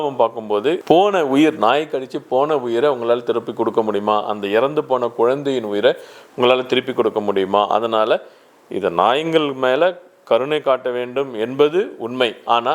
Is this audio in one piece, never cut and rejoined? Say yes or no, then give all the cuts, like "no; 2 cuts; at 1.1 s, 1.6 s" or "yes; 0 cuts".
yes; 0 cuts